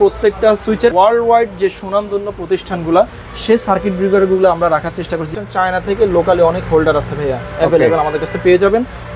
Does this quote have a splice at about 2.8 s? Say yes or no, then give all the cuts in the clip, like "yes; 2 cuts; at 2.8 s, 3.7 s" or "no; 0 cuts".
no; 2 cuts; at 0.9 s, 5.3 s